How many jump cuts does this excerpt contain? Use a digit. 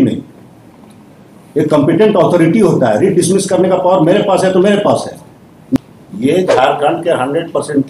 1